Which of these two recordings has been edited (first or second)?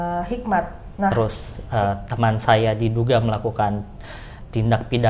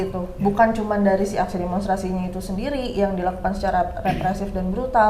first